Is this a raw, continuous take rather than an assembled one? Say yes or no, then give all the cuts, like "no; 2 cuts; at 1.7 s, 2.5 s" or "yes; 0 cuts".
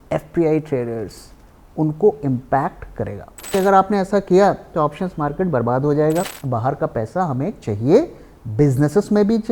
no; 2 cuts; at 3.5 s, 6.4 s